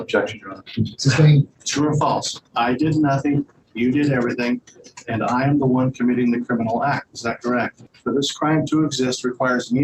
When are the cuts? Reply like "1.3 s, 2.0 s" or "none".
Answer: 1.6 s, 7.8 s

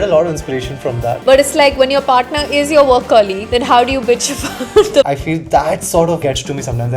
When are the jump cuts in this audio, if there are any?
1.2 s, 5.1 s

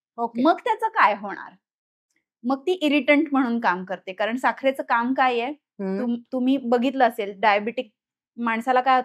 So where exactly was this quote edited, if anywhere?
none

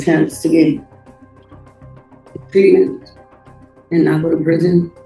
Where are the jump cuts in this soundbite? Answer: none

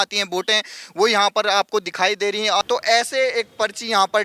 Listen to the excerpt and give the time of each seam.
2.6 s

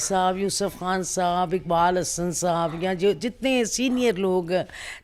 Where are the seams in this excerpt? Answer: none

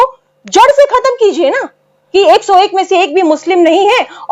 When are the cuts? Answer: 2.0 s

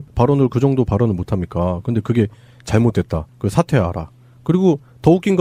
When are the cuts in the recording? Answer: none

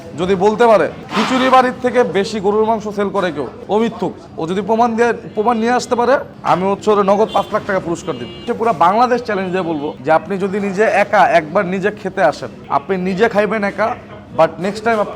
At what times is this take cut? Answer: 1.0 s, 3.6 s, 4.2 s, 6.3 s, 8.5 s, 9.9 s, 12.5 s

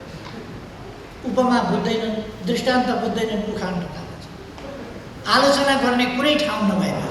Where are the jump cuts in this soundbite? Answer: none

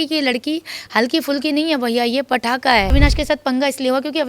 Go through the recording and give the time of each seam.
2.9 s

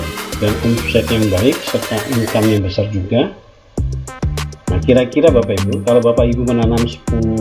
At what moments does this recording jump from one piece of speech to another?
3.5 s, 4.8 s

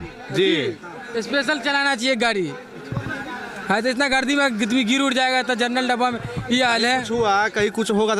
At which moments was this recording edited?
none

